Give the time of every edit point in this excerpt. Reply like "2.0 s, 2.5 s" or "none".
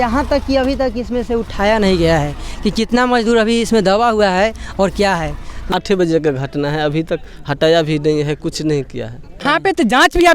5.7 s, 9.4 s